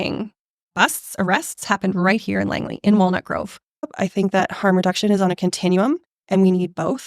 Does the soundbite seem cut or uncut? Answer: cut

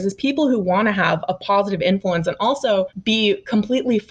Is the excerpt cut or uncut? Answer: cut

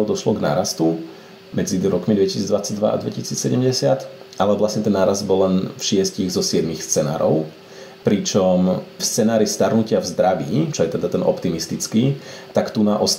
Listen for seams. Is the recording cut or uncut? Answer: uncut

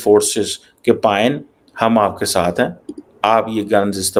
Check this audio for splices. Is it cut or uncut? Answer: uncut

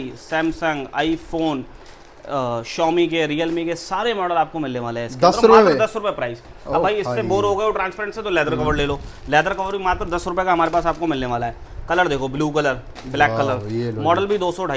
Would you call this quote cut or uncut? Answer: uncut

